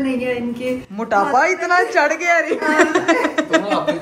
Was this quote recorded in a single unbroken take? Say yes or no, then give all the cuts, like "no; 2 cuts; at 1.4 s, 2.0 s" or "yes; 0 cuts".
yes; 0 cuts